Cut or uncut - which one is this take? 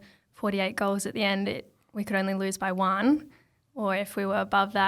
uncut